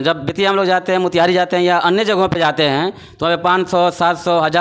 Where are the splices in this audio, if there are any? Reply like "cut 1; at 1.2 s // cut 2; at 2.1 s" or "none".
none